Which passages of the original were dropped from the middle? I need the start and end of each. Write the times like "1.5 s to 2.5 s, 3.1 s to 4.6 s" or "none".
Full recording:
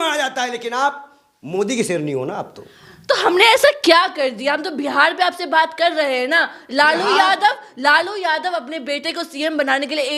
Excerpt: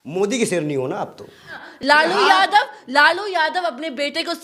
3.0 s to 6.5 s